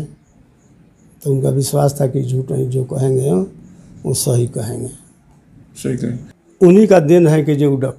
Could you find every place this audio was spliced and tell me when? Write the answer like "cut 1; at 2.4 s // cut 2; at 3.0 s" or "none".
cut 1; at 6.3 s